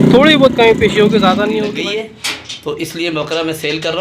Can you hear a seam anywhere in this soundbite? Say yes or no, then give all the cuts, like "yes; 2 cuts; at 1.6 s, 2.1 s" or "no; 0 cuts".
yes; 1 cut; at 1.7 s